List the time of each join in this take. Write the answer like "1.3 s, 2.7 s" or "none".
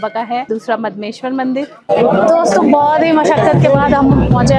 1.8 s